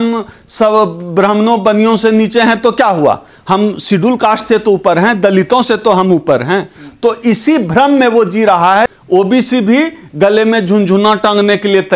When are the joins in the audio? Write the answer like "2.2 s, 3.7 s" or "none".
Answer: 8.9 s